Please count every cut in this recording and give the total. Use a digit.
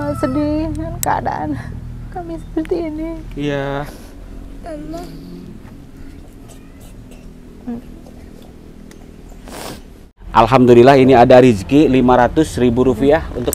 1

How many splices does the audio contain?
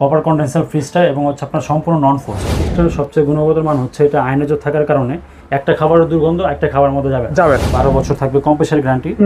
2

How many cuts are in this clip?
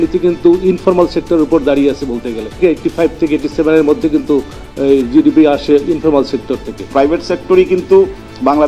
2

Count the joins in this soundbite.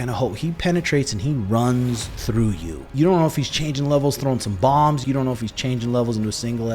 2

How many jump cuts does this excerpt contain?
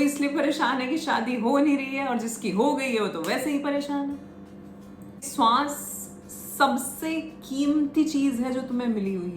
1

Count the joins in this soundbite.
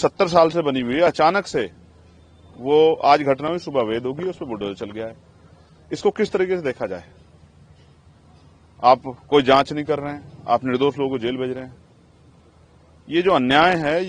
0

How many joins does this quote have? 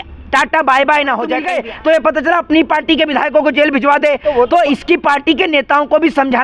1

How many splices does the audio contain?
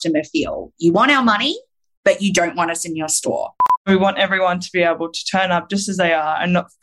1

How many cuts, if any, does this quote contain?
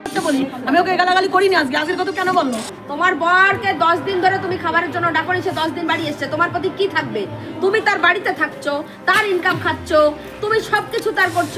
1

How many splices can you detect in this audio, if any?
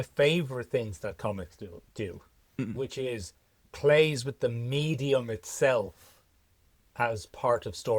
0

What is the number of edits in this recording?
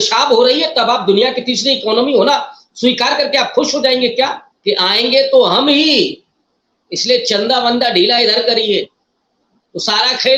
1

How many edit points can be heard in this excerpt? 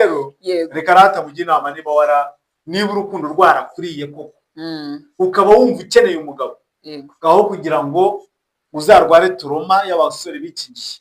1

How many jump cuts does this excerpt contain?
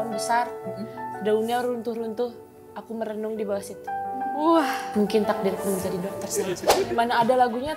1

